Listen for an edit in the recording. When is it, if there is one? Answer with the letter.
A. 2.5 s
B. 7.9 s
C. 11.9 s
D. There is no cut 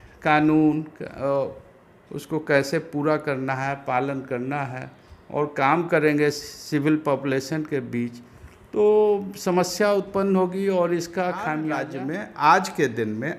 C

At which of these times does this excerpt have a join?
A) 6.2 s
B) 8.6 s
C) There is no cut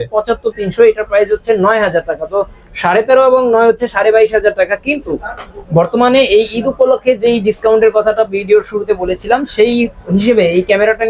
C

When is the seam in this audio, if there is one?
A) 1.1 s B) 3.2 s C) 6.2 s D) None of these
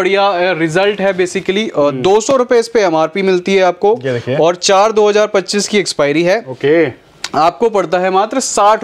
D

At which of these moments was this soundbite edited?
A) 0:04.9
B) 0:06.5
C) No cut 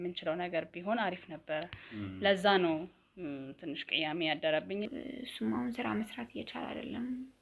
A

